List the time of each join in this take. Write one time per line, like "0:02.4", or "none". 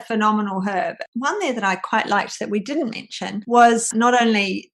0:01.0
0:03.9